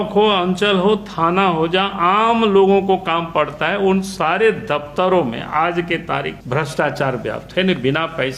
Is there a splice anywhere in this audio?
yes; 1 cut; at 6.4 s

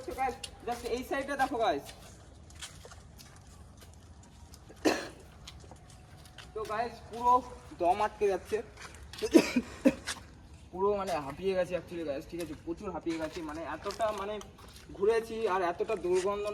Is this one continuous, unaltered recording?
yes; 0 cuts

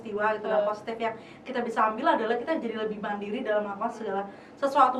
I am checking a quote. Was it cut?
no; 0 cuts

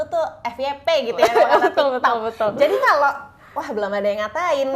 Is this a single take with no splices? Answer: yes; 0 cuts

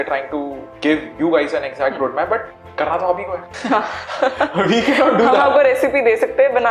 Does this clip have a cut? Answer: no; 0 cuts

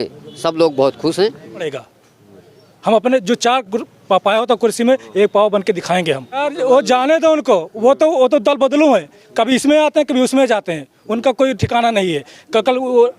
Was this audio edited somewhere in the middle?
yes; 2 cuts; at 1.7 s, 6.5 s

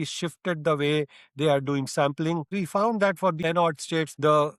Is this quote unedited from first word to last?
no; 2 cuts; at 2.5 s, 3.6 s

